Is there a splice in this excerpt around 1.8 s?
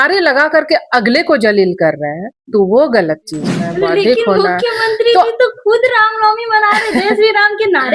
no; 1 cut; at 3.6 s

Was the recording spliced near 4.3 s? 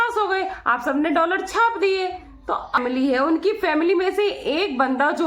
no; 1 cut; at 2.8 s

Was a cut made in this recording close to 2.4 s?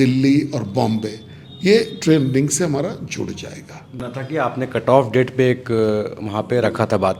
no; 1 cut; at 4.0 s

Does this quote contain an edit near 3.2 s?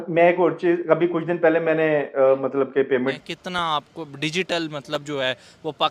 yes; 1 cut; at 3.2 s

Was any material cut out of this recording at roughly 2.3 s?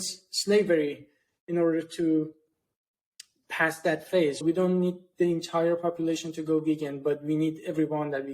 no; 1 cut; at 4.4 s

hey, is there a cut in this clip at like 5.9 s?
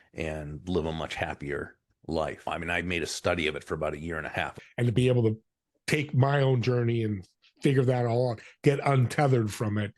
no; 2 cuts; at 2.5 s, 4.6 s

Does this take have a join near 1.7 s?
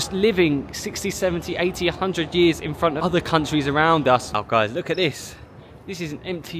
no; 2 cuts; at 3.0 s, 4.3 s

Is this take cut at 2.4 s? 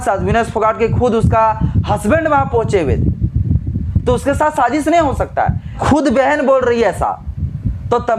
no; 1 cut; at 5.8 s

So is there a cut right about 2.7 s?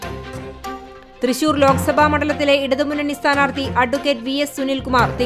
no; 1 cut; at 1.0 s

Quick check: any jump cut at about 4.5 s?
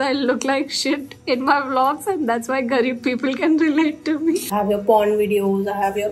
yes; 1 cut; at 4.5 s

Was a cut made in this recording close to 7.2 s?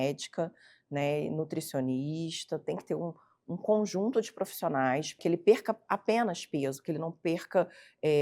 no; 1 cut; at 5.2 s

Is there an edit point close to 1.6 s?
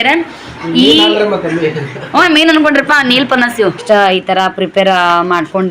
no; 1 cut; at 3.8 s

